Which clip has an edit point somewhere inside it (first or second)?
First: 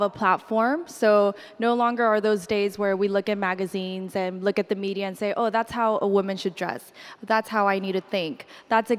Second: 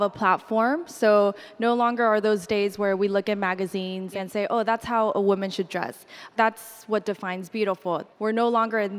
second